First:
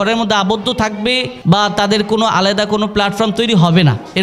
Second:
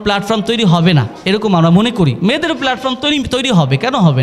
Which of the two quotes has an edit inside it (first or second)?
first